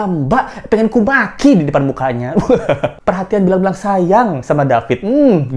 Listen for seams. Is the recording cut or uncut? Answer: cut